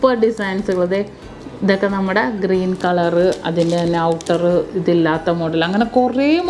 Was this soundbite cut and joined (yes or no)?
no